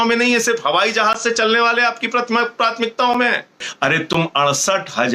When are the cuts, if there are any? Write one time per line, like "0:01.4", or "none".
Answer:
0:03.7